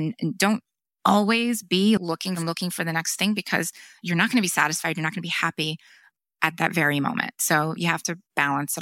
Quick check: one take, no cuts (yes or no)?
no